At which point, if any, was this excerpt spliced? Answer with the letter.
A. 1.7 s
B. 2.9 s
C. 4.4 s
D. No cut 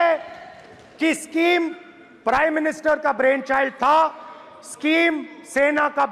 D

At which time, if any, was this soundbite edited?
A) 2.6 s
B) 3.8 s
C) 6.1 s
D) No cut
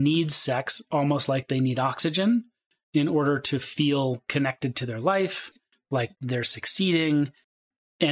C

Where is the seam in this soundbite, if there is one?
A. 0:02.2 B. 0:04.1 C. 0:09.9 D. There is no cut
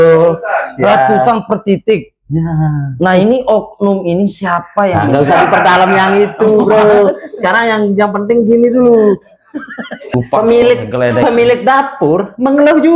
C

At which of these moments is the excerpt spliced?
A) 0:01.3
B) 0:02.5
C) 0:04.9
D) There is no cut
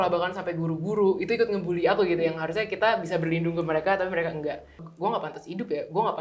C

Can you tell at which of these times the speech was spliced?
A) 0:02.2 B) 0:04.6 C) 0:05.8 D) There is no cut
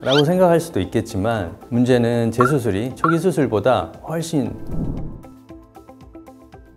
B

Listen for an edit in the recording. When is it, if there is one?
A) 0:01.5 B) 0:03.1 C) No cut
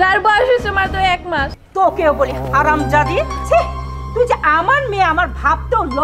A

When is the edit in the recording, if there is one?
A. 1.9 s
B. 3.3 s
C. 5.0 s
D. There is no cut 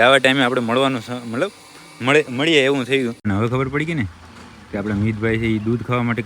B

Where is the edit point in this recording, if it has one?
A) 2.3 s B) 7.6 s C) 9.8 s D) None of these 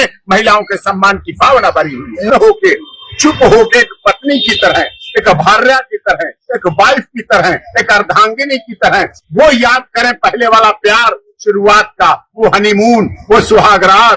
A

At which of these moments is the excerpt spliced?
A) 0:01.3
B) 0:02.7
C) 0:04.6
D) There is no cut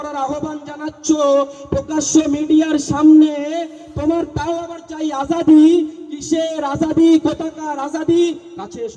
D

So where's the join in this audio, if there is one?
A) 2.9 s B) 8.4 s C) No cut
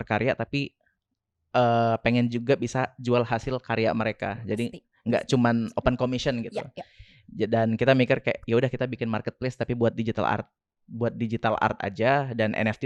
C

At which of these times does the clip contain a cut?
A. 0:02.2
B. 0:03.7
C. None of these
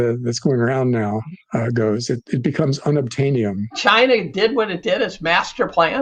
B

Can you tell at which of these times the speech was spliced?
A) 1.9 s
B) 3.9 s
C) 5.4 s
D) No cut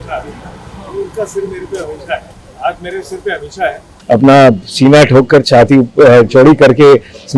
B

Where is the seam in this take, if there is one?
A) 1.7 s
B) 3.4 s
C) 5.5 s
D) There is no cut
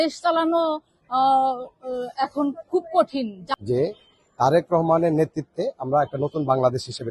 B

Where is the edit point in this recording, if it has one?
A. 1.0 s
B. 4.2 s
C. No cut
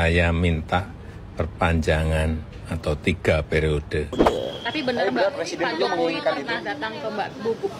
B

